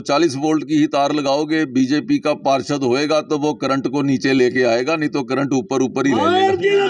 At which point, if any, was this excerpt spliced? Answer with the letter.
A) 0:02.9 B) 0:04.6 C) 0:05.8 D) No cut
D